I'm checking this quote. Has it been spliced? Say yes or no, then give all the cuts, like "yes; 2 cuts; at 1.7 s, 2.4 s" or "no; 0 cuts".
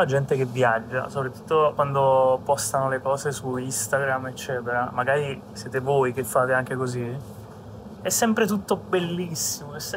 no; 0 cuts